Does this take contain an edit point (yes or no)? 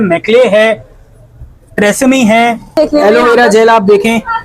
yes